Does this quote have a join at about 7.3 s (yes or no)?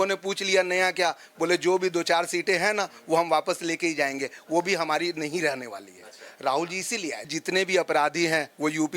yes